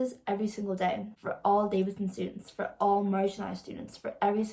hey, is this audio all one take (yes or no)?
no